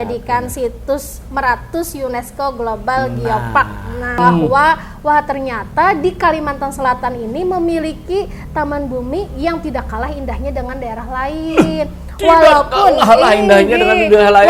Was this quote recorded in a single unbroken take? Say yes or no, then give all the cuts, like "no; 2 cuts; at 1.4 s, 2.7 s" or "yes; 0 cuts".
no; 1 cut; at 4.2 s